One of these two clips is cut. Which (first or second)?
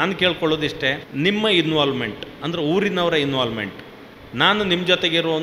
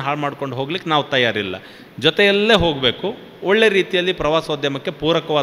first